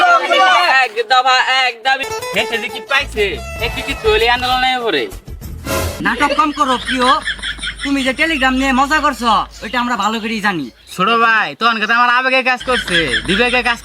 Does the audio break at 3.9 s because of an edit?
no; 2 cuts; at 2.0 s, 6.0 s

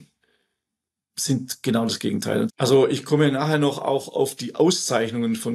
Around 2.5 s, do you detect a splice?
yes; 1 cut; at 2.5 s

